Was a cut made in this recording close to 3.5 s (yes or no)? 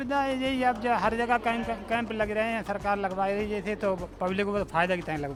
no